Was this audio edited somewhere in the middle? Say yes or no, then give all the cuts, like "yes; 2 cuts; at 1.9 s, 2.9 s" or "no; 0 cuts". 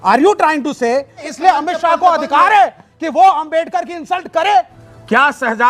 yes; 2 cuts; at 1.2 s, 4.8 s